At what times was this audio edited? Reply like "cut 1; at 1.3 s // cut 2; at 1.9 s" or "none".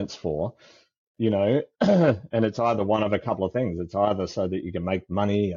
none